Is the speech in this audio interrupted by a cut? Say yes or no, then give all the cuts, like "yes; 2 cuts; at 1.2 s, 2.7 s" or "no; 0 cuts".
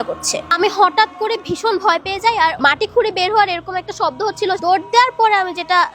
yes; 2 cuts; at 2.6 s, 4.6 s